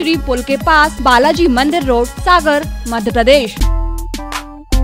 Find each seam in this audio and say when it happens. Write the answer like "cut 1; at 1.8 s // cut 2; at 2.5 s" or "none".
cut 1; at 0.9 s // cut 2; at 2.2 s // cut 3; at 3.6 s